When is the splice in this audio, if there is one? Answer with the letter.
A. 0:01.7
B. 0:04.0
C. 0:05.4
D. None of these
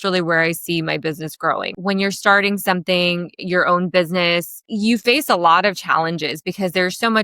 A